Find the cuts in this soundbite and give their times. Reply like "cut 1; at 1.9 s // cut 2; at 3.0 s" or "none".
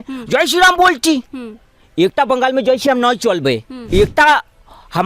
cut 1; at 3.7 s